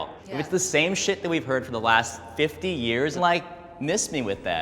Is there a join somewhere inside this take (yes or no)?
yes